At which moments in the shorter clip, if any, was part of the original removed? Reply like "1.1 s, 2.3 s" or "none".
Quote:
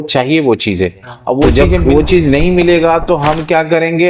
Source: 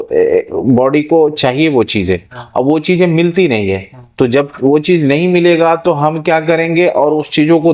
1.5 s